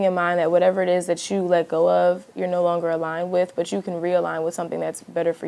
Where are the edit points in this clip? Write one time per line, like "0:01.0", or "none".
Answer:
none